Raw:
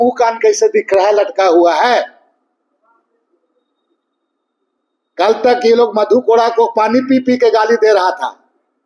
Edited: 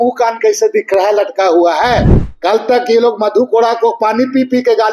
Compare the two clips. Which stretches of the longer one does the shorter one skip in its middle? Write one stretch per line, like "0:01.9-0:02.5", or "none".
0:02.2-0:05.0